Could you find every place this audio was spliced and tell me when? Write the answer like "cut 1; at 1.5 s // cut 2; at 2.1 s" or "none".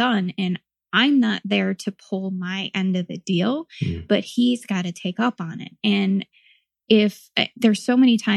none